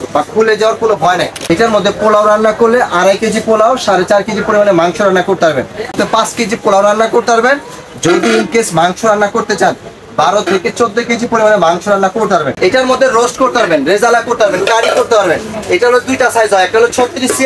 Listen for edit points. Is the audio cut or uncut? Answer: cut